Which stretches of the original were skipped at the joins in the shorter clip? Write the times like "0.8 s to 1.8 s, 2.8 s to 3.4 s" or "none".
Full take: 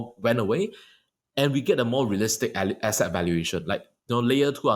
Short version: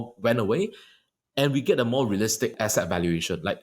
2.5 s to 2.8 s

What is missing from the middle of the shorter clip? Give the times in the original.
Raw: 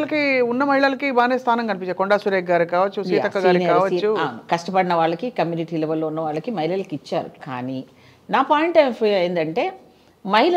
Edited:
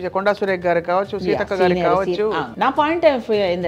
4.3 s to 8.2 s

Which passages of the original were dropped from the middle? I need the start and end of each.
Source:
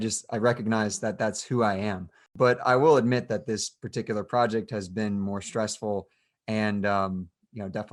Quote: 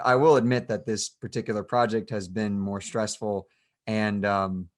none

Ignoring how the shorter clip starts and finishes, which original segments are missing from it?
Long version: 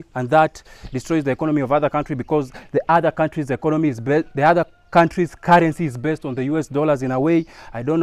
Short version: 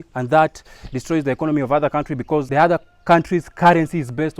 2.5 s to 4.3 s

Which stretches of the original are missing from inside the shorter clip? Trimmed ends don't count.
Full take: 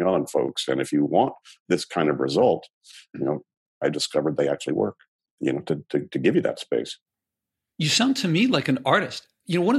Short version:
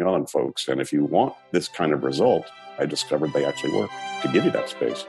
1.4 s to 1.6 s, 2.8 s to 3.6 s, 5.2 s to 6.1 s

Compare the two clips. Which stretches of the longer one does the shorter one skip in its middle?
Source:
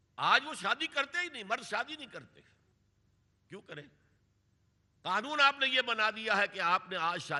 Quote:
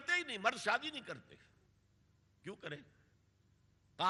none

